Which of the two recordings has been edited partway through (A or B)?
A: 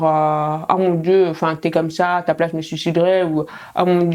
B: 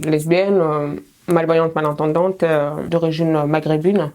B